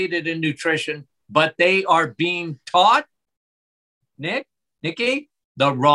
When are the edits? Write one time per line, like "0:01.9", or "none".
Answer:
none